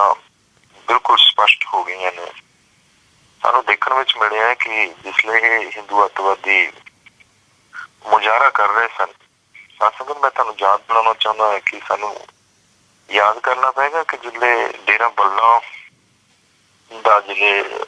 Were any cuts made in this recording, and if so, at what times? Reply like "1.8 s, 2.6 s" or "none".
none